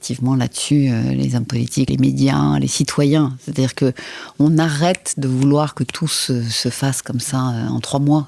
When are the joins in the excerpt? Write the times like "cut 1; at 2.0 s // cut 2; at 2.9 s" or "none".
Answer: cut 1; at 1.9 s